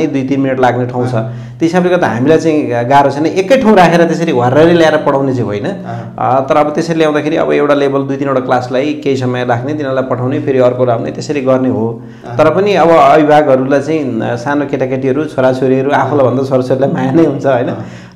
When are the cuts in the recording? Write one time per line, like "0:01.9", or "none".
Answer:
none

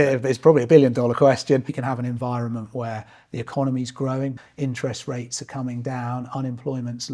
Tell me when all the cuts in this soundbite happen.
0:01.8
0:04.3

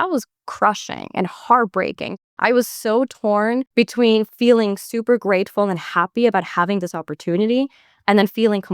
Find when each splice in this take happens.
0:02.2
0:03.7

